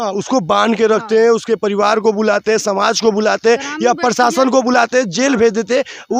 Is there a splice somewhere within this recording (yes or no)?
no